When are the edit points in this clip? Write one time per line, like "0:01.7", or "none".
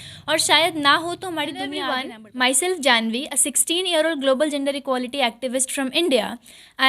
0:01.9